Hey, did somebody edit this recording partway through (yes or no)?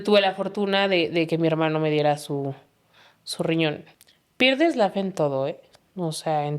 yes